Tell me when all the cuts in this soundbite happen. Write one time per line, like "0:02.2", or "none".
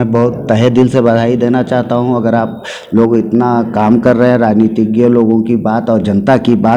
none